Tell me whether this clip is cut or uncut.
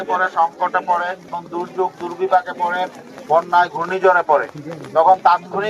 cut